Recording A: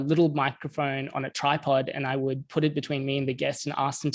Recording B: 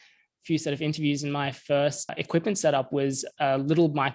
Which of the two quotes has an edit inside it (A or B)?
B